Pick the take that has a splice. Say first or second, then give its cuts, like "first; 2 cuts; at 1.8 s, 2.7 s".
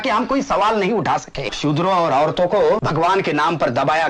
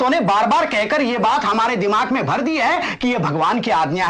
first; 2 cuts; at 1.5 s, 2.9 s